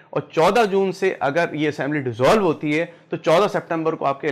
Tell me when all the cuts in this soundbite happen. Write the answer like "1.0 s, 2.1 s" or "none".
none

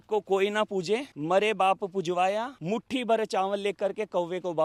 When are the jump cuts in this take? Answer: none

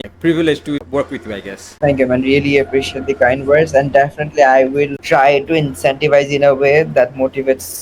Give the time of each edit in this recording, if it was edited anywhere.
5.0 s

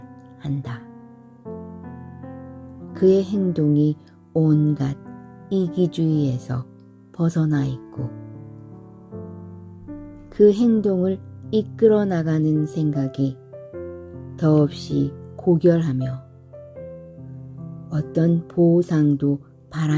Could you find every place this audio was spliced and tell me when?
16.7 s, 17.9 s

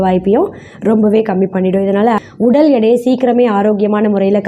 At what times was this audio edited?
2.2 s

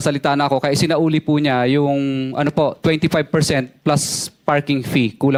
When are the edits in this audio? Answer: none

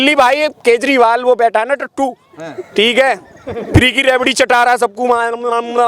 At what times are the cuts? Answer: none

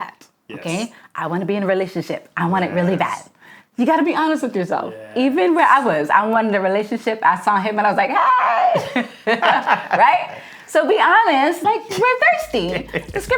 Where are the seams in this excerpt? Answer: 11.6 s

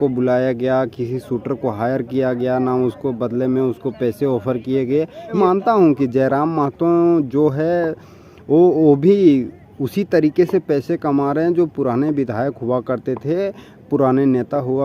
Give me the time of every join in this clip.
5.4 s

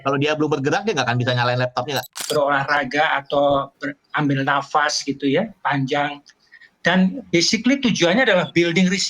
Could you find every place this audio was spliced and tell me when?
2.1 s

